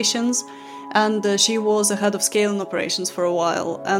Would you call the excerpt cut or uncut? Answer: uncut